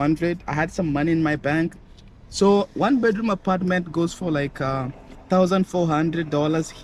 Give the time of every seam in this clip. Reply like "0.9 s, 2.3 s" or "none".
none